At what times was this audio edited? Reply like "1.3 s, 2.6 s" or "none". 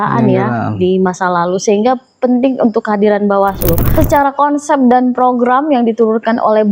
3.8 s